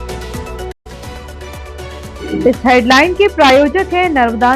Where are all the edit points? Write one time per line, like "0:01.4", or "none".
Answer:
0:00.8
0:02.2